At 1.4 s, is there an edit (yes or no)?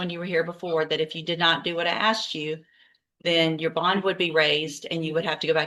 no